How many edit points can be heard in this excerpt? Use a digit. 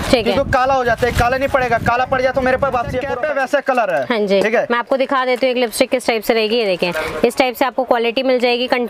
1